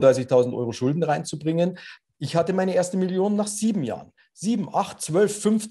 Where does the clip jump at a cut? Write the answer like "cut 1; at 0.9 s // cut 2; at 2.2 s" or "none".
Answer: cut 1; at 1.9 s